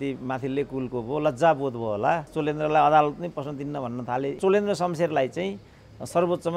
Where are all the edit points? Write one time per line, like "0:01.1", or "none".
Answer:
0:02.3
0:04.4